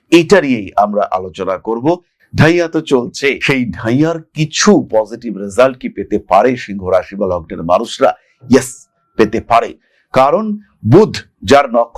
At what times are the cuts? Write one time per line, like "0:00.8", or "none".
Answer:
0:02.2